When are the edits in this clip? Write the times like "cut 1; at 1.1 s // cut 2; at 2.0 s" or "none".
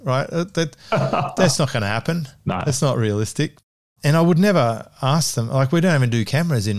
none